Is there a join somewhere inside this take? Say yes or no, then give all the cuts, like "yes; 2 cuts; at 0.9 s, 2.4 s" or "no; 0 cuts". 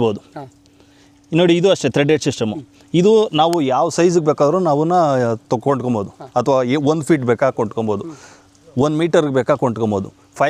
no; 0 cuts